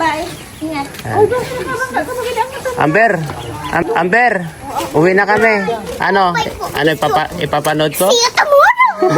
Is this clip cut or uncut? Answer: cut